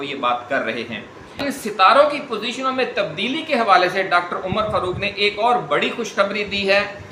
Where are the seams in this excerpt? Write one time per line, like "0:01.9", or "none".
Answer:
0:01.4